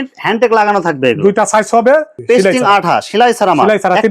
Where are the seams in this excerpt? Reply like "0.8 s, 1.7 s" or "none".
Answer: 2.1 s